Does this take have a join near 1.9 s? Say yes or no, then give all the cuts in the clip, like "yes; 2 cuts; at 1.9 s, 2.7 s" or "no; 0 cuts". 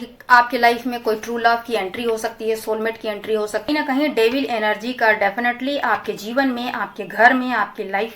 no; 1 cut; at 3.7 s